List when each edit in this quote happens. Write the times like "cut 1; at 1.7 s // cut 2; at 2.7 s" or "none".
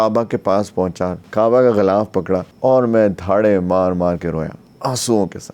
cut 1; at 1.1 s // cut 2; at 2.5 s